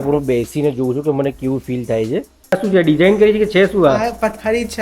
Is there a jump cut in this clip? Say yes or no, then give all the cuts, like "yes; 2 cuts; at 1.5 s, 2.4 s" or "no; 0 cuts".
yes; 1 cut; at 2.6 s